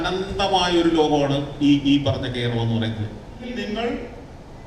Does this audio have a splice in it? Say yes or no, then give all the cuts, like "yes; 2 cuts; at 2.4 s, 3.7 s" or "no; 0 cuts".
yes; 1 cut; at 3.5 s